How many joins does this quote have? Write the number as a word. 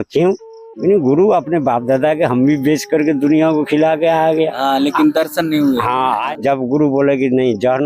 one